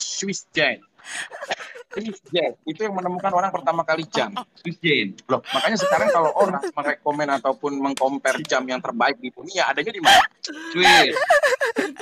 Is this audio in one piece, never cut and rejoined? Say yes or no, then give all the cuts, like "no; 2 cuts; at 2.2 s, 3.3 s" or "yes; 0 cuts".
yes; 0 cuts